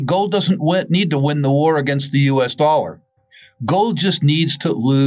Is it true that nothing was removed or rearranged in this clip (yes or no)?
yes